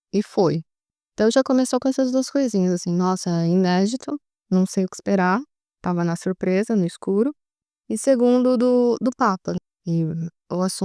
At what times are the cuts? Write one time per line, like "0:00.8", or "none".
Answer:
0:09.6